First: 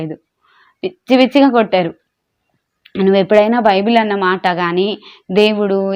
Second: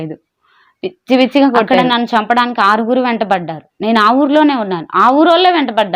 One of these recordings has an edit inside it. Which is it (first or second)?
second